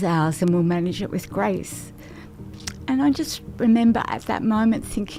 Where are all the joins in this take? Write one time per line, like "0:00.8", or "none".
none